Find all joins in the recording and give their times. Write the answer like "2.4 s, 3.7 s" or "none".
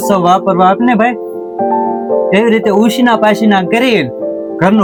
none

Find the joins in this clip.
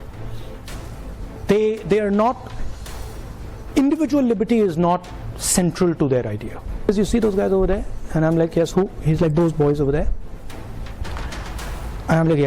6.9 s

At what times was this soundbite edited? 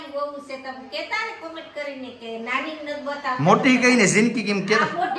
none

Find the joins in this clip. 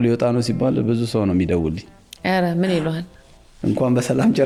none

